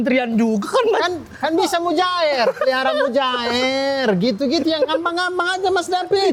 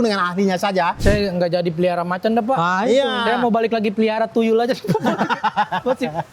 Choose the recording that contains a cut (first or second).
second